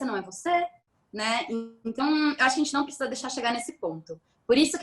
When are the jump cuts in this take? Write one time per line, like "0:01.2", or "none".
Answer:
none